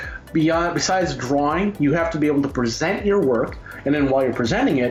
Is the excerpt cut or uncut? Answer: uncut